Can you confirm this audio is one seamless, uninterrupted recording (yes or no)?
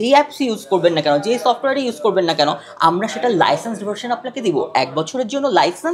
yes